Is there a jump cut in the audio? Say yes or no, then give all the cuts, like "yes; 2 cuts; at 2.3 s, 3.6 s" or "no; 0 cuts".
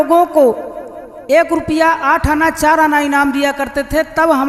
no; 0 cuts